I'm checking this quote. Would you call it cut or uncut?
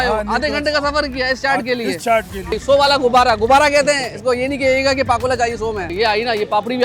cut